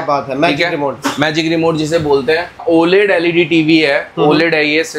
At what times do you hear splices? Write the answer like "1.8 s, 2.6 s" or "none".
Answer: 2.6 s